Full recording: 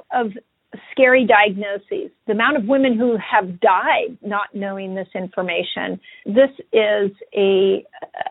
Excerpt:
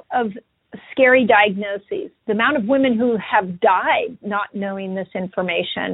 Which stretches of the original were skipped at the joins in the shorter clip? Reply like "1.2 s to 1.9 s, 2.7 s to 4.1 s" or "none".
none